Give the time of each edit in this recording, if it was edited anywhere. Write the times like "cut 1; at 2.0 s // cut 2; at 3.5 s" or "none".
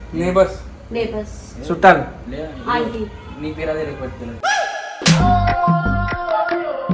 none